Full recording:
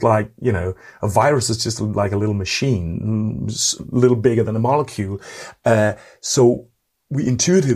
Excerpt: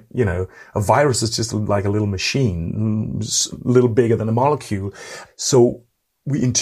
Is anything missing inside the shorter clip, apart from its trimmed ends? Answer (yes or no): yes